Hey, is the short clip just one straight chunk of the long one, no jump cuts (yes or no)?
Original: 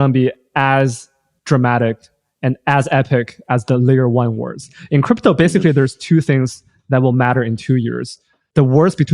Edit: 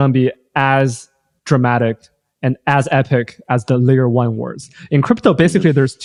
yes